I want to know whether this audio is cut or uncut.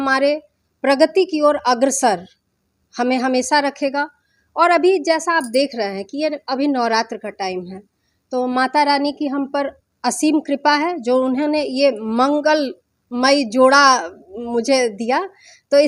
uncut